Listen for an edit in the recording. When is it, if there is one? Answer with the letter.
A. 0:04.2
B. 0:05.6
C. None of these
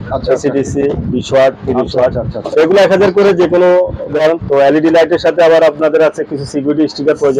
A